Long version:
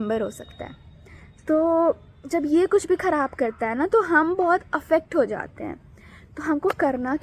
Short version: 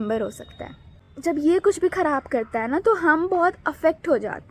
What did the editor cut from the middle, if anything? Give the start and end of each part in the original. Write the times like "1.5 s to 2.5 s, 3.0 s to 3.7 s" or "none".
1.1 s to 2.1 s